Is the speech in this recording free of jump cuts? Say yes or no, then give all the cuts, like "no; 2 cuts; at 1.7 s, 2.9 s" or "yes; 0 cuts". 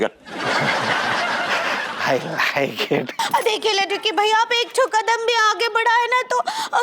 no; 1 cut; at 3.1 s